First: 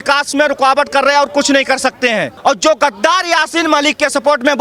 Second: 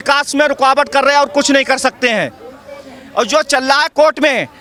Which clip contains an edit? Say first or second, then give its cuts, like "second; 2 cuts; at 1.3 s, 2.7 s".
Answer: first; 1 cut; at 2.3 s